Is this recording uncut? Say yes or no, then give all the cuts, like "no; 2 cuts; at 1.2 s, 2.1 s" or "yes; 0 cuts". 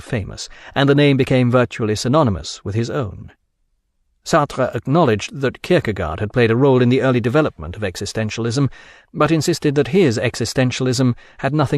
yes; 0 cuts